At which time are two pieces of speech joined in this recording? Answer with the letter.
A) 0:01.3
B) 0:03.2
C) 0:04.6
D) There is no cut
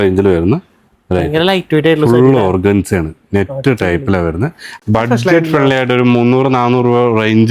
C